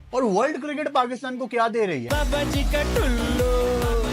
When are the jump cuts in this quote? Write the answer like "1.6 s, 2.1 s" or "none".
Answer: 2.0 s